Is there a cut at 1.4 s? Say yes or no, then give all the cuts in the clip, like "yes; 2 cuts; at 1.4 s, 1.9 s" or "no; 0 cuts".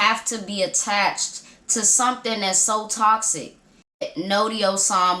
no; 1 cut; at 3.8 s